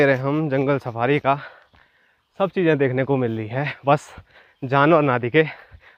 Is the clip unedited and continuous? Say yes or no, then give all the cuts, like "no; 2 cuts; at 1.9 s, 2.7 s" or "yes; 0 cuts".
yes; 0 cuts